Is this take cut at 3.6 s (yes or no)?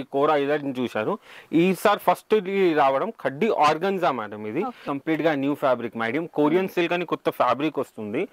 no